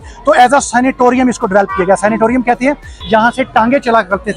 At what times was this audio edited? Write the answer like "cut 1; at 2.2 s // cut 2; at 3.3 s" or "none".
cut 1; at 2.9 s